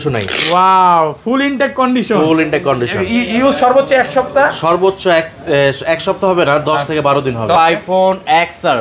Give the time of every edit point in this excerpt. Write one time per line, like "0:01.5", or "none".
0:07.6